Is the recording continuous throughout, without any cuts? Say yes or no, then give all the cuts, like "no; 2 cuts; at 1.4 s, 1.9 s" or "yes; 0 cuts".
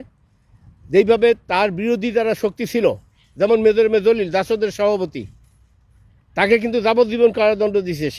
yes; 0 cuts